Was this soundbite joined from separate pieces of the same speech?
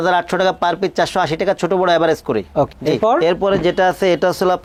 no; 0 cuts

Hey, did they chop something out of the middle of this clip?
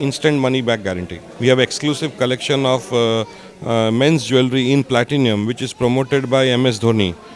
yes; 1 cut; at 1.2 s

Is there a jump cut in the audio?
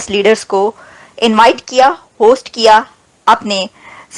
no; 0 cuts

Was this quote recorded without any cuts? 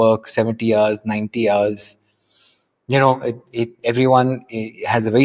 yes; 0 cuts

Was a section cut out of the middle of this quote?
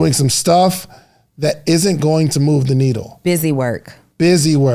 no; 0 cuts

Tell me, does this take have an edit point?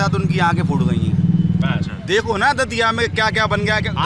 no; 0 cuts

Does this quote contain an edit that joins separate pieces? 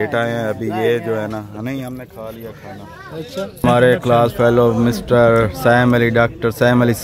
yes; 1 cut; at 3.6 s

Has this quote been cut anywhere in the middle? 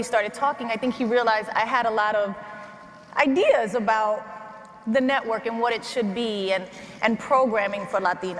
no; 0 cuts

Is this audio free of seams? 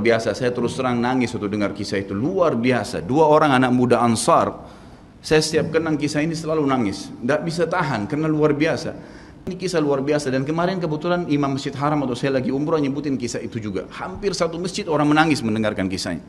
no; 1 cut; at 9.5 s

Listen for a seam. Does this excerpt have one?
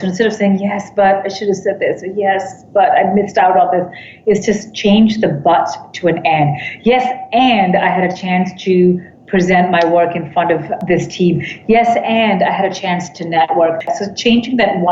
yes; 2 cuts; at 10.8 s, 13.9 s

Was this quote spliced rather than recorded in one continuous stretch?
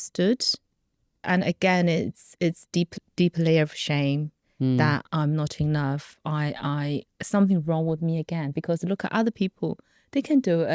yes; 2 cuts; at 1.2 s, 5.1 s

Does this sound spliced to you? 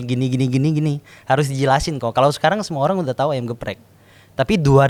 no; 0 cuts

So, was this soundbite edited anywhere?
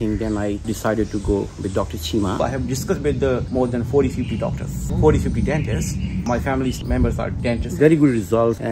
yes; 3 cuts; at 2.4 s, 4.8 s, 7.8 s

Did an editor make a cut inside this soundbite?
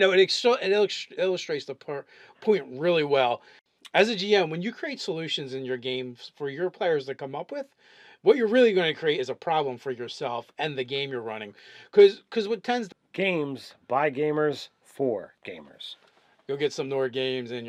no; 0 cuts

